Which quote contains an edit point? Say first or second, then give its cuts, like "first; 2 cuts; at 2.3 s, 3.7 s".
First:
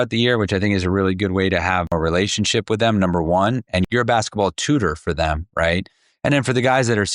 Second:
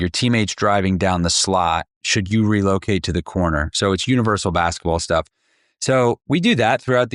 first; 3 cuts; at 1.9 s, 3.8 s, 6.0 s